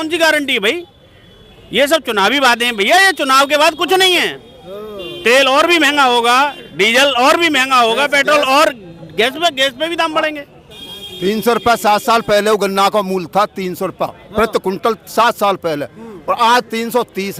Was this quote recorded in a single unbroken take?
yes; 0 cuts

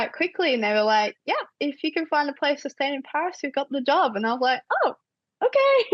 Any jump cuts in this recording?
no; 0 cuts

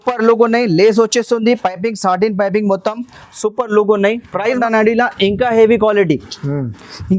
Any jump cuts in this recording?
yes; 1 cut; at 4.6 s

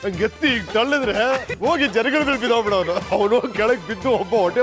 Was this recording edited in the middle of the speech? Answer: no; 0 cuts

